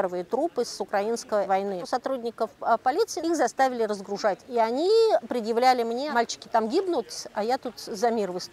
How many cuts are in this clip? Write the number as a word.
four